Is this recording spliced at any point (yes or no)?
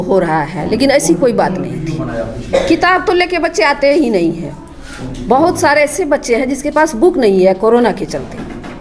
no